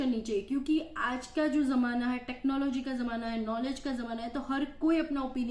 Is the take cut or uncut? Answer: uncut